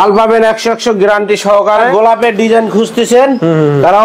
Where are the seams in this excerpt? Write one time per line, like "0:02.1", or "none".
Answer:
0:01.9